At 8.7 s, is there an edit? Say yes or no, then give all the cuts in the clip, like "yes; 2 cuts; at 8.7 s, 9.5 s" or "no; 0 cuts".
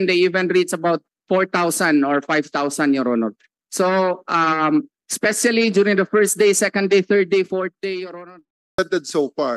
yes; 1 cut; at 8.7 s